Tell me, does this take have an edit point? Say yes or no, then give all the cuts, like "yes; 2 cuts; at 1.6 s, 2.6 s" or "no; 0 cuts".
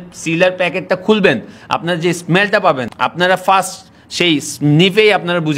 no; 0 cuts